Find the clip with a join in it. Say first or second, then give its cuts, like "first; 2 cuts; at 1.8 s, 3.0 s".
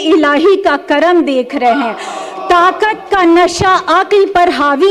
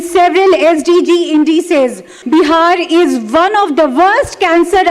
second; 1 cut; at 2.1 s